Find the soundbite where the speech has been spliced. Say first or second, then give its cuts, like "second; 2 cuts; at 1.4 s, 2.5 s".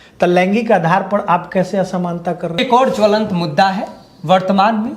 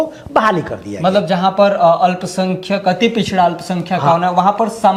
first; 1 cut; at 2.6 s